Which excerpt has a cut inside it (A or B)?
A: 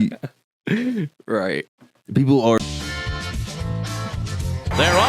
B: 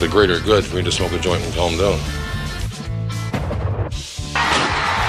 A